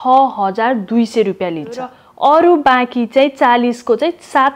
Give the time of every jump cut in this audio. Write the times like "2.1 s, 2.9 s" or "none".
2.0 s